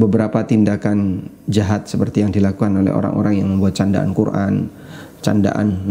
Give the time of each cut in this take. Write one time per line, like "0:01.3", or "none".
none